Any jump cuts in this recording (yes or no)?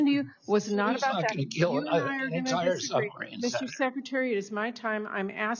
no